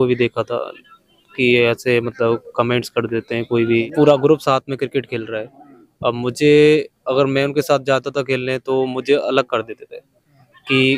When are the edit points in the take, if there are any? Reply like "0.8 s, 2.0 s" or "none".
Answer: 3.8 s